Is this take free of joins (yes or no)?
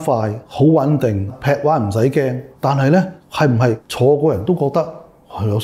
yes